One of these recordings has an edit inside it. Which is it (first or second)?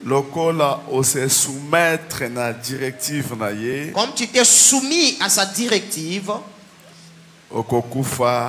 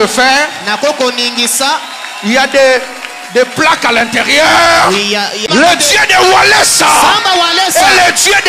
second